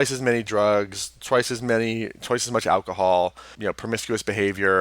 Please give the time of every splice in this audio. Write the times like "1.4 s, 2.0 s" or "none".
3.5 s

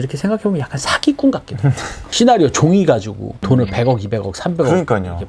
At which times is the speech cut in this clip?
none

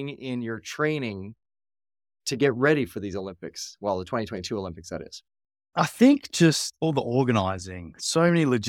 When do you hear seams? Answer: 5.3 s

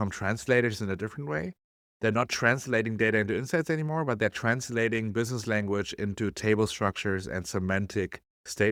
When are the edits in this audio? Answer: none

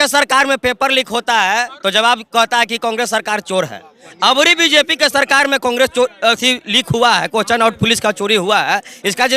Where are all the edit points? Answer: none

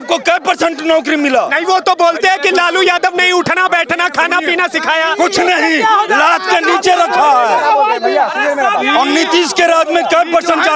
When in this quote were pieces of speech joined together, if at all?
none

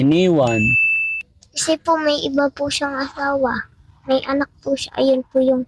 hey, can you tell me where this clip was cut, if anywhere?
none

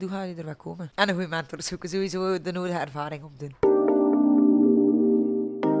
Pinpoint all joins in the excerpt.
3.5 s

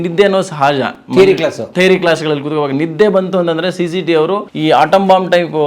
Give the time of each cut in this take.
4.5 s

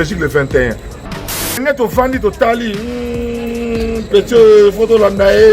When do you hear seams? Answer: 1.2 s

